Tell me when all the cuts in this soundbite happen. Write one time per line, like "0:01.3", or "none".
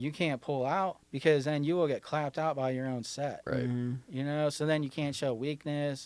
0:01.1